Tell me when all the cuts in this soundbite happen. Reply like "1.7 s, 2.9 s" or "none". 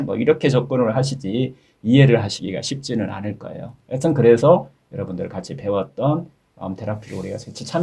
6.4 s